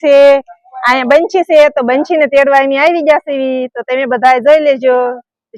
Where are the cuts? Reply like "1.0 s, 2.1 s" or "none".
none